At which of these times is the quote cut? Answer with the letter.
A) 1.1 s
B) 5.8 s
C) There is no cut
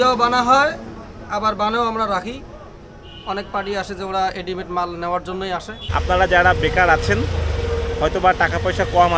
B